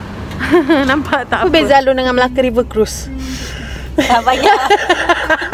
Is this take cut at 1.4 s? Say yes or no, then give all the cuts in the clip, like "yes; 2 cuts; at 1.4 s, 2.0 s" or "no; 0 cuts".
yes; 1 cut; at 1.4 s